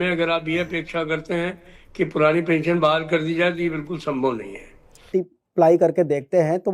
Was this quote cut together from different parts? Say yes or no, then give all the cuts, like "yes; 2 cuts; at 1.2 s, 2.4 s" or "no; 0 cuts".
yes; 1 cut; at 5.1 s